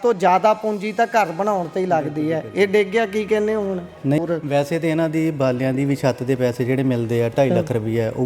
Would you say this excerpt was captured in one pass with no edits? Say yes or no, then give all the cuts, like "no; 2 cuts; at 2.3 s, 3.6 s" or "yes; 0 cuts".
no; 1 cut; at 4.2 s